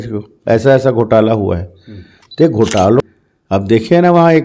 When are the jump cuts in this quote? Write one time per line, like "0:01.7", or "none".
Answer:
0:03.0

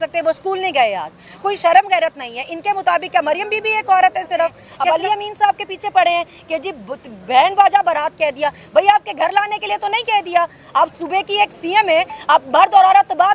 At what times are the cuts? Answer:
0:04.7

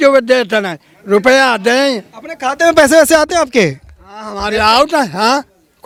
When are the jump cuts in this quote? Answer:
none

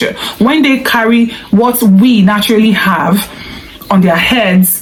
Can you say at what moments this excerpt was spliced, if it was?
none

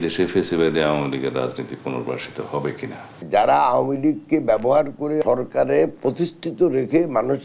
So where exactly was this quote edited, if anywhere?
0:03.1
0:05.2

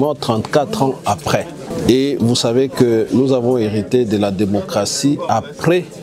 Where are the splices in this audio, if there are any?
0:01.7

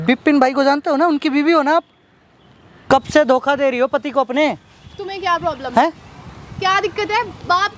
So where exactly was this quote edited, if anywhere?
0:02.7

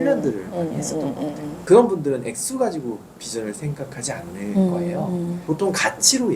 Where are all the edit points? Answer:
0:01.5
0:05.4

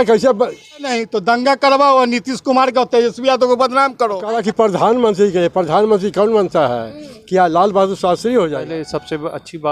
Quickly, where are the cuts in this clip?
0:00.9
0:04.3
0:08.6

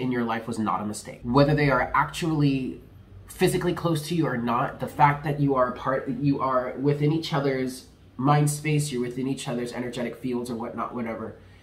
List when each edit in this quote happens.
0:01.1

